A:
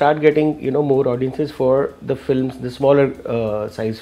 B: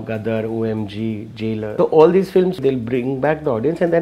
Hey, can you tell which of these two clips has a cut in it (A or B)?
B